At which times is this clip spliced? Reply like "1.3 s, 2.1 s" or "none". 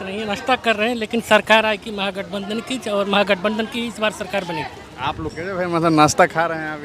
5.3 s